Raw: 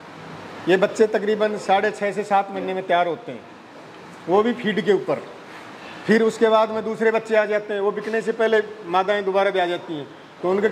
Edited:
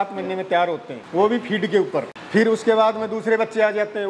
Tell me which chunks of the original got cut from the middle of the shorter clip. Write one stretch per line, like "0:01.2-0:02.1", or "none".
0:03.3-0:04.1
0:05.3-0:05.9